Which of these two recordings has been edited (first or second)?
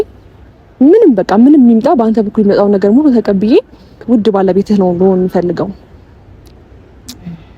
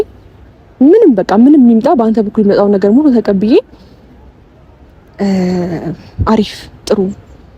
first